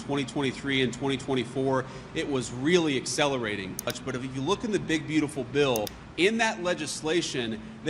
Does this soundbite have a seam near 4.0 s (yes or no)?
yes